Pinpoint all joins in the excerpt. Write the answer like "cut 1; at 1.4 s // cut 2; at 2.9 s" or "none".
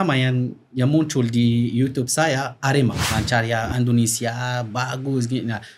cut 1; at 3.0 s